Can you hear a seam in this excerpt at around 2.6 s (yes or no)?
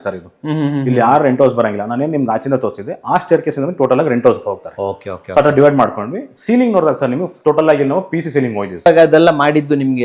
no